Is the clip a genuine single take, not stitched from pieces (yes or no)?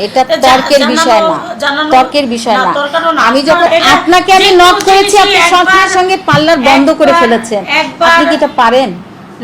no